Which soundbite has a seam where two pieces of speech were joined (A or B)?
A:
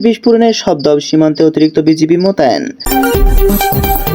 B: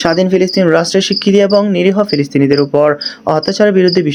A